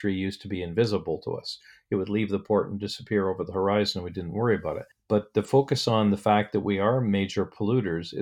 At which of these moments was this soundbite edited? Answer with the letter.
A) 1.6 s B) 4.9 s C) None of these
B